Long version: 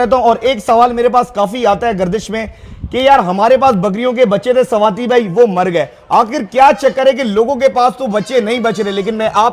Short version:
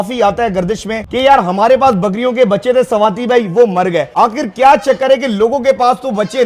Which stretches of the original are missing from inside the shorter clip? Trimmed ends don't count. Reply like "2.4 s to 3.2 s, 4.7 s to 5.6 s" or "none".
2.4 s to 2.8 s, 5.9 s to 6.0 s